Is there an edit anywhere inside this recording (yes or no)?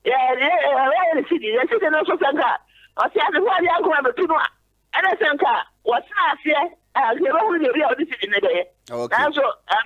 no